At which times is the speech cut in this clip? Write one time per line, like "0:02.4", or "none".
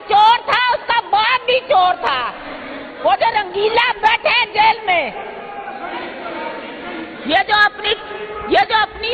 none